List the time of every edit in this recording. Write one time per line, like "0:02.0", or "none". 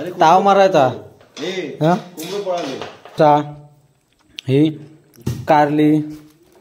0:03.1